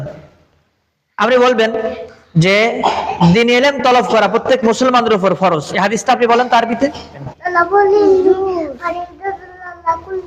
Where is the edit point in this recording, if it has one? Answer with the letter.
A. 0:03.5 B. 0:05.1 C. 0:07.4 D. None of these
D